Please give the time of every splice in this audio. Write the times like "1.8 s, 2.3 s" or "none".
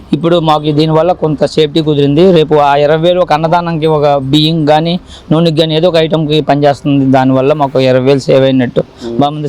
none